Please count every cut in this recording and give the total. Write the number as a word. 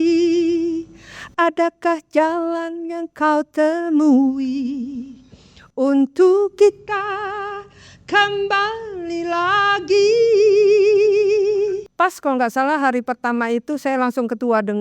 one